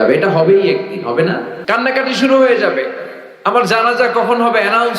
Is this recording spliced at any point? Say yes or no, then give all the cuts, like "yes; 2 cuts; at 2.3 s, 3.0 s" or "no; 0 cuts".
yes; 1 cut; at 1.5 s